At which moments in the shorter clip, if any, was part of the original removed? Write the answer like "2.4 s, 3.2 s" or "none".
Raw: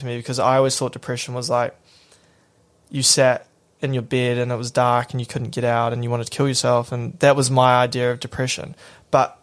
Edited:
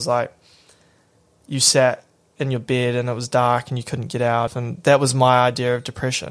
4.6 s